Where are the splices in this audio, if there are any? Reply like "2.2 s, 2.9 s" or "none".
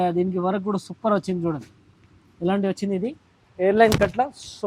none

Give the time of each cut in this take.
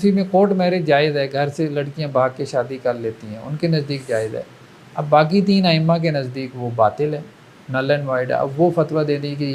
none

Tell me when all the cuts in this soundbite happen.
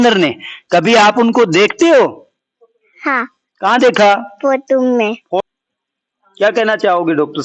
5.4 s

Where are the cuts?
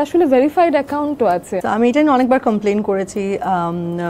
1.5 s

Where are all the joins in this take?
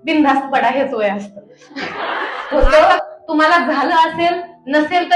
2.7 s

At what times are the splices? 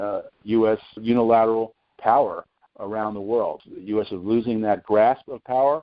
1.0 s, 3.7 s

